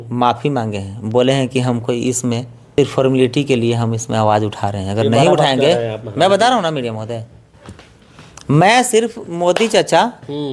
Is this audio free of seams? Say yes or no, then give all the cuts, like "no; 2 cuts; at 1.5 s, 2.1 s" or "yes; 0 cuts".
no; 1 cut; at 2.7 s